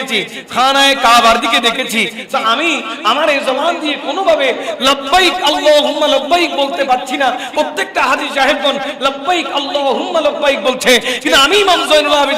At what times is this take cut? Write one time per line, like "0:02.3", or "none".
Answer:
none